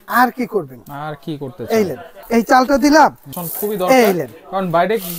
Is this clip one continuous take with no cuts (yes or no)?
no